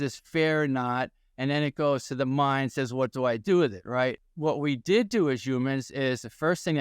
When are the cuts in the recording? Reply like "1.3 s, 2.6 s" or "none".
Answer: 4.2 s